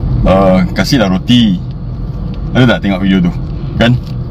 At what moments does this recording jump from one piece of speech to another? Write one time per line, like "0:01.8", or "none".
none

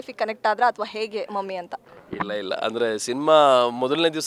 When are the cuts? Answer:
none

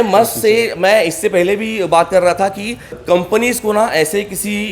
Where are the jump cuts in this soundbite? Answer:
0:03.0

